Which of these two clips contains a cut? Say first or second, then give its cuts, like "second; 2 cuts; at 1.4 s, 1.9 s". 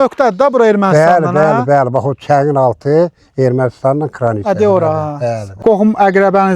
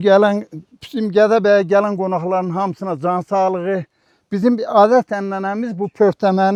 first; 1 cut; at 5.6 s